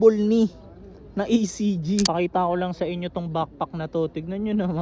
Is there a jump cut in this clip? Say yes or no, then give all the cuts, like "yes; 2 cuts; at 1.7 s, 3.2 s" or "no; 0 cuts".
yes; 1 cut; at 2.1 s